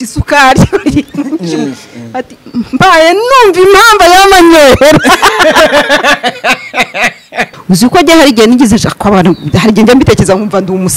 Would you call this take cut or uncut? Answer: cut